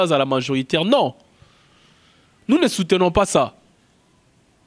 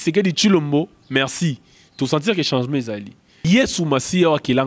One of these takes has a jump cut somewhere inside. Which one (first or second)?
second